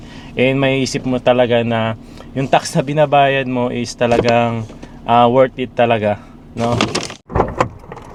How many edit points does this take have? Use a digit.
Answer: 0